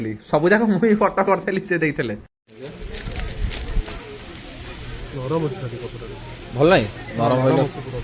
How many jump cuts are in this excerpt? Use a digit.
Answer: 1